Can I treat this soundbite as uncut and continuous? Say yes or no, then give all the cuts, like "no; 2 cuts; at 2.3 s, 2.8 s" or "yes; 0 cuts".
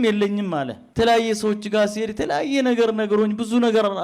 yes; 0 cuts